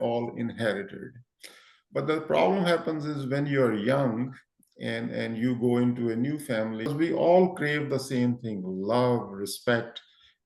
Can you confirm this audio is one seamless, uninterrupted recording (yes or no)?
no